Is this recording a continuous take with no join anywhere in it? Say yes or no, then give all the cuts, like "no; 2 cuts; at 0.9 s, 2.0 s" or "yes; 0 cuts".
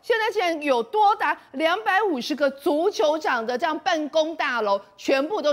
yes; 0 cuts